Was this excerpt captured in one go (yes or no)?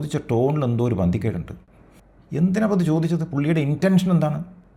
yes